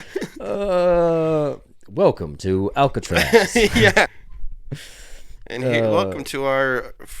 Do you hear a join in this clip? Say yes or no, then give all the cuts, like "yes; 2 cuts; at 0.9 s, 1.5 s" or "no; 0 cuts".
yes; 1 cut; at 4.3 s